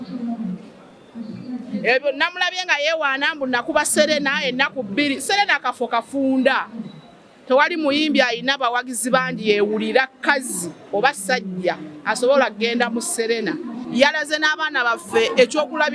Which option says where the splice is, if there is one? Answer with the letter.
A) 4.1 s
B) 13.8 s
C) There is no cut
B